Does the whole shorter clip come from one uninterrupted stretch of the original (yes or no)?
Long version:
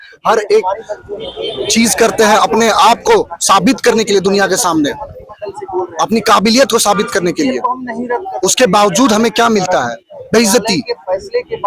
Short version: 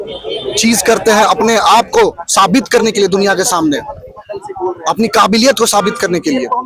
yes